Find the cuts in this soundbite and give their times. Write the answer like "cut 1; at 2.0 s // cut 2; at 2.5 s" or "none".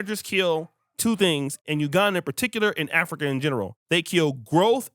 cut 1; at 1.6 s // cut 2; at 3.8 s